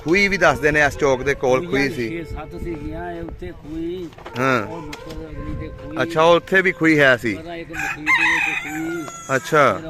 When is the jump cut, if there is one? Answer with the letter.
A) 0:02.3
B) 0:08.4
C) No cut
C